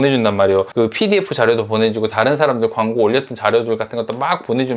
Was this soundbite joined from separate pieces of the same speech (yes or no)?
no